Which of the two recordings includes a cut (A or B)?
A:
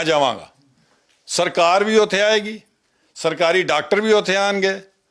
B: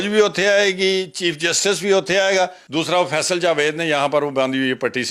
B